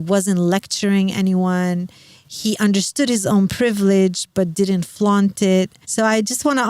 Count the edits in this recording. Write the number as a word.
one